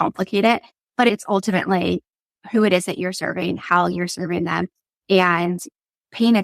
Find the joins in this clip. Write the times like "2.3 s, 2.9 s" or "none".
1.1 s